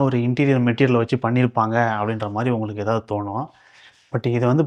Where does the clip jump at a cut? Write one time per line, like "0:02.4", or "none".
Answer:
none